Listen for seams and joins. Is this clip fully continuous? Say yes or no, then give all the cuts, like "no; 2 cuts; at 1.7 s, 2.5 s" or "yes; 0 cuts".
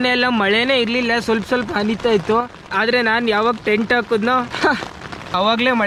yes; 0 cuts